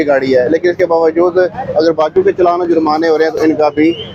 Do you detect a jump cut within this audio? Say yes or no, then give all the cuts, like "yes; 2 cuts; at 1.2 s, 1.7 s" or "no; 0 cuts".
no; 0 cuts